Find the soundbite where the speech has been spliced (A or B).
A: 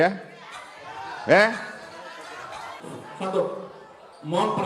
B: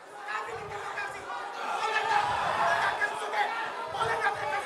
A